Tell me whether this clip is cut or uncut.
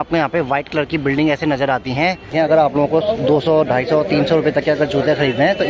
cut